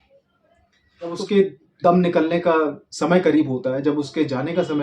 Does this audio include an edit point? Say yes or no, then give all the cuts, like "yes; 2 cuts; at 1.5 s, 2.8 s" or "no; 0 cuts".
yes; 1 cut; at 1.1 s